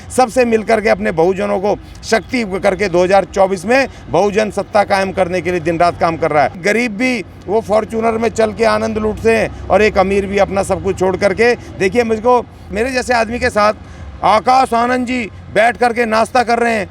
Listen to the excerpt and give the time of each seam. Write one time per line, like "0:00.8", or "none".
0:06.6
0:12.7